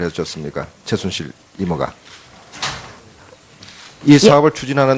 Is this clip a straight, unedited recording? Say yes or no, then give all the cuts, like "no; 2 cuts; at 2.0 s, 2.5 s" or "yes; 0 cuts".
no; 1 cut; at 2.8 s